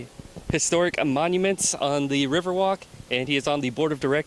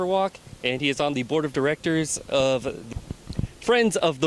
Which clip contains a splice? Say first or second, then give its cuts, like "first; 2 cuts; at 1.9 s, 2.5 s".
second; 1 cut; at 2.8 s